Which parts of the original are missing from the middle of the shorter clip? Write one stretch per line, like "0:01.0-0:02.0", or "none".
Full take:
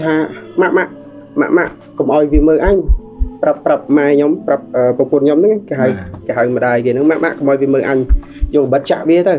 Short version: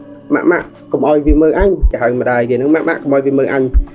0:02.9-0:06.2